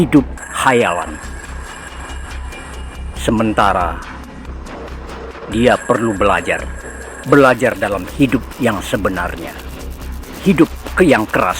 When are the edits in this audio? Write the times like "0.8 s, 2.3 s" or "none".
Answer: 1.6 s, 3.2 s, 4.0 s, 5.5 s

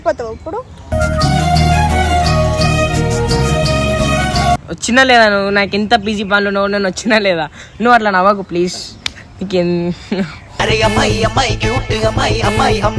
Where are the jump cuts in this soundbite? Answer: 4.6 s

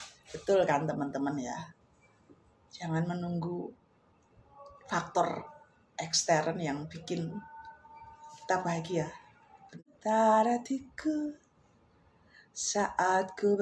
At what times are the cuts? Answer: 9.8 s

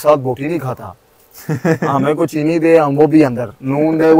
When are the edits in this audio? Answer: none

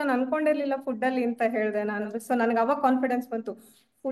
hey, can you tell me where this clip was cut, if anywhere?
2.1 s

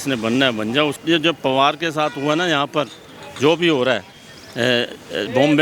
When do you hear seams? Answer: 1.0 s

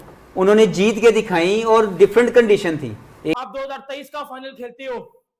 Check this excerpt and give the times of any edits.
3.4 s

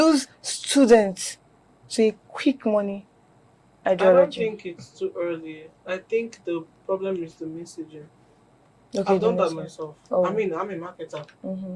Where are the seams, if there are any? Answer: none

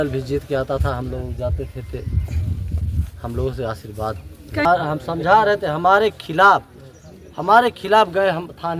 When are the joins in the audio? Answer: 4.7 s

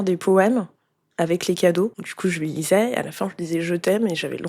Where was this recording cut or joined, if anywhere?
2.1 s

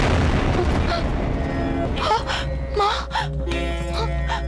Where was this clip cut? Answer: 1.9 s

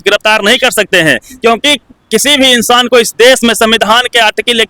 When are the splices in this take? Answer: none

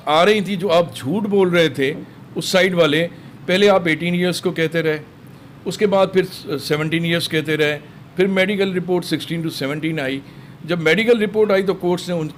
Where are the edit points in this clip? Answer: none

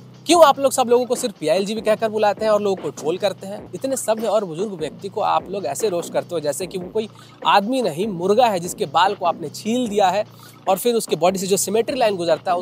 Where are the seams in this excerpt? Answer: 3.7 s

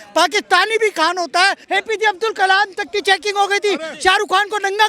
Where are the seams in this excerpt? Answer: 1.6 s

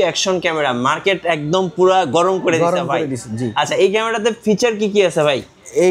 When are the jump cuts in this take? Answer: none

